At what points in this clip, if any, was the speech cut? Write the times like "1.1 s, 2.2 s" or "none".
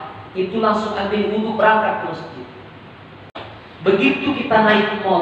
3.4 s